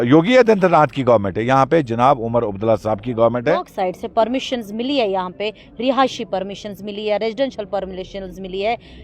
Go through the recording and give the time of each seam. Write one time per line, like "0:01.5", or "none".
0:03.7